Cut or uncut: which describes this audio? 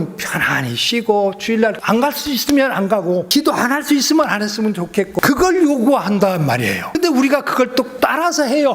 cut